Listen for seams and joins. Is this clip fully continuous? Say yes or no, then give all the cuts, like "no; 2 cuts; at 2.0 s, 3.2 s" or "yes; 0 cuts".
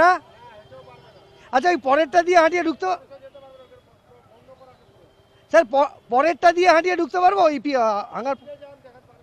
yes; 0 cuts